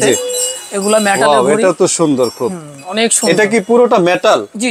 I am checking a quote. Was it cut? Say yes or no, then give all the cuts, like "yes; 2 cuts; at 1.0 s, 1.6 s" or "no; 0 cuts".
no; 0 cuts